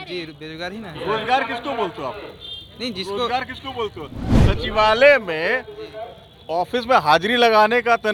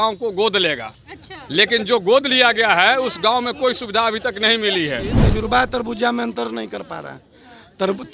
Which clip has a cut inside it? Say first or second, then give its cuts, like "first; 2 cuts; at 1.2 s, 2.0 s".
second; 1 cut; at 5.2 s